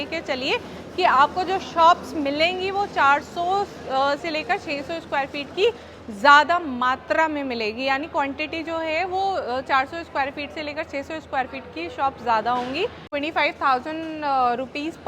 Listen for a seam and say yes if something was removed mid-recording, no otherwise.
yes